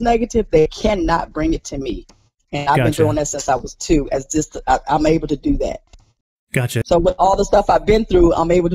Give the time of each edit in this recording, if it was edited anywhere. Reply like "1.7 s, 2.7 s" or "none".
6.8 s